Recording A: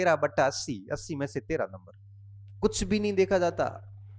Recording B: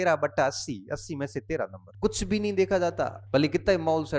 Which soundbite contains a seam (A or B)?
B